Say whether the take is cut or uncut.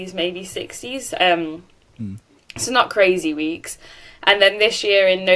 uncut